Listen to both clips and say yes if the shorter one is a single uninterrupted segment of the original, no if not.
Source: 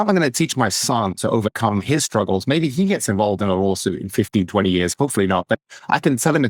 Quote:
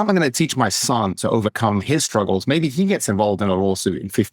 yes